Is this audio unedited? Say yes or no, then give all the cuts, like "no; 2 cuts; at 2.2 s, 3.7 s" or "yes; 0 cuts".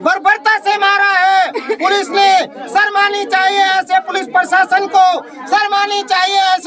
yes; 0 cuts